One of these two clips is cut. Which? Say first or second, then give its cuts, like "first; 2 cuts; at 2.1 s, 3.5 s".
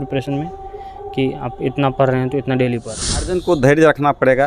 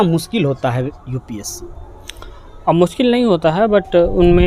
first; 1 cut; at 3.3 s